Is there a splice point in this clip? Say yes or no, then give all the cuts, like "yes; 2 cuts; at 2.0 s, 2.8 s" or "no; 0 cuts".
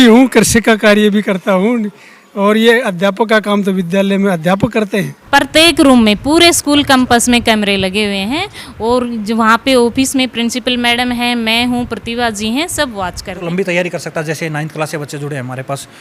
yes; 2 cuts; at 5.3 s, 13.5 s